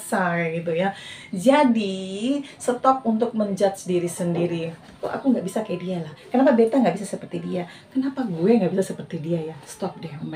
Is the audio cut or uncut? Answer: uncut